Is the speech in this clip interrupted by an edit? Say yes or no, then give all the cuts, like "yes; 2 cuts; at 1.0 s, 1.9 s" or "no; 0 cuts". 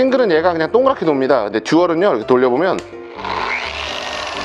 no; 0 cuts